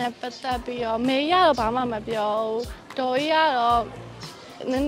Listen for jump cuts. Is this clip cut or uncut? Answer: uncut